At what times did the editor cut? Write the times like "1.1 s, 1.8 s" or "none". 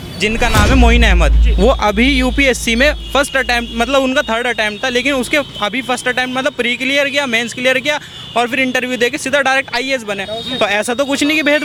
none